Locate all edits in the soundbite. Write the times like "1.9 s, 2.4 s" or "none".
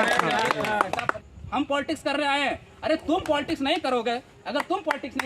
1.1 s